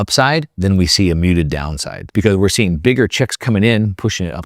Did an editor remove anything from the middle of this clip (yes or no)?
no